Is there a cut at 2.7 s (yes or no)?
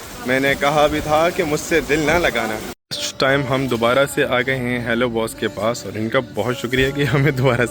yes